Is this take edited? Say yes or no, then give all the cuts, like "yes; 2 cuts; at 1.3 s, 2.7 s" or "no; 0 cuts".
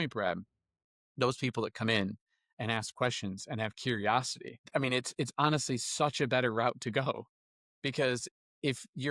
no; 0 cuts